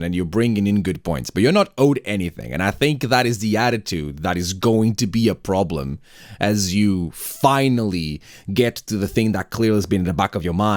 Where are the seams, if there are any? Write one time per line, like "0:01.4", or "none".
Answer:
none